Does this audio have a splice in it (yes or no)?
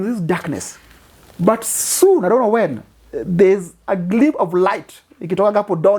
no